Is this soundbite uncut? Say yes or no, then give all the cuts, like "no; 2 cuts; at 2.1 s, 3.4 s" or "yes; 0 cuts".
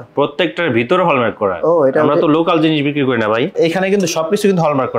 no; 1 cut; at 3.5 s